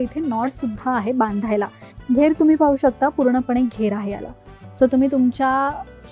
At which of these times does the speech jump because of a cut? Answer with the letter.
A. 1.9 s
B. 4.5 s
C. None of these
A